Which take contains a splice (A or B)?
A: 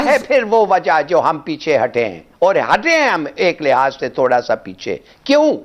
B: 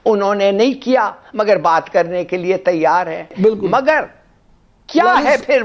B